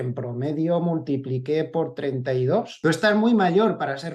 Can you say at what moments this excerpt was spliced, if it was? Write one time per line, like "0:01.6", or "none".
0:02.8